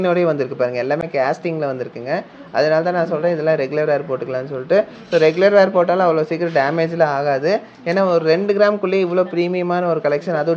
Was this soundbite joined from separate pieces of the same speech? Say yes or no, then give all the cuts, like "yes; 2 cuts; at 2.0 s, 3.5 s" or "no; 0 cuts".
no; 0 cuts